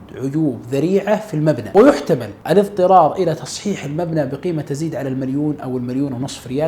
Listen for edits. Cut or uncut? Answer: cut